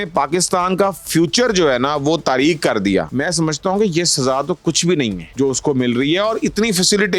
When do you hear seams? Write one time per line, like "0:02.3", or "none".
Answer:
0:03.1
0:05.2

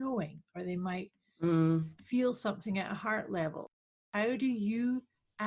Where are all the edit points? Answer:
0:03.8

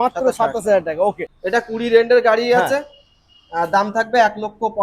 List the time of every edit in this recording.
0:01.3

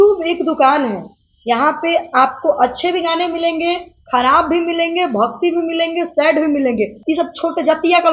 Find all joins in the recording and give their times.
0:07.0

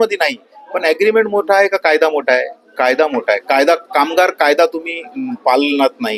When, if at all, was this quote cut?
none

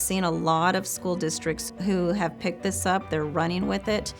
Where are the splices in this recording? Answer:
0:01.7

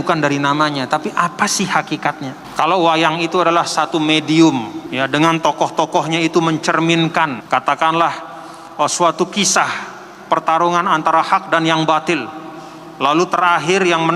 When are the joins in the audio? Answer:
0:02.4
0:04.8
0:07.4

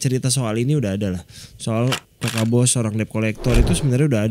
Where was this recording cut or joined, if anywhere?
0:02.1

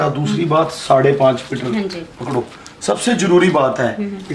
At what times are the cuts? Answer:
none

